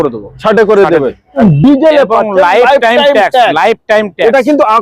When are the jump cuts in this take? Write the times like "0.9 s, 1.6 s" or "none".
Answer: 1.3 s

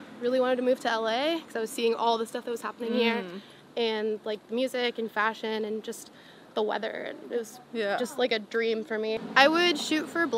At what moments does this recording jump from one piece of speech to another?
9.2 s

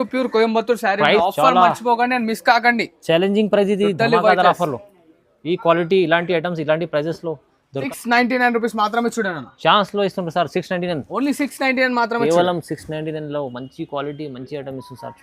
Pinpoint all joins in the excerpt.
1.2 s, 7.9 s

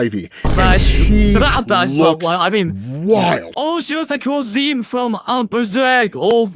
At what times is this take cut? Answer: 3.6 s

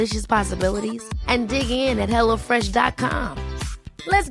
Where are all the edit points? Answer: none

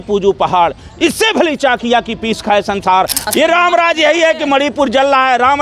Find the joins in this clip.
3.2 s

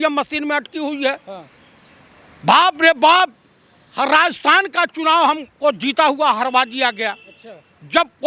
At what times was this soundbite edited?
none

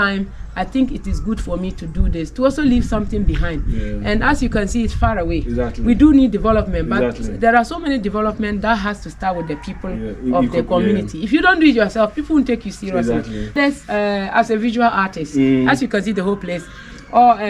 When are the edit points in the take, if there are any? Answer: 13.5 s

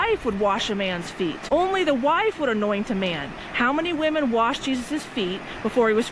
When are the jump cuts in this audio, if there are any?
1.4 s

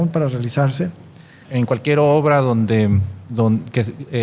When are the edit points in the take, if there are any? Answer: 1.4 s

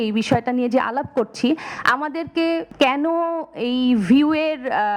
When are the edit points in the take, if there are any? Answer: 2.7 s

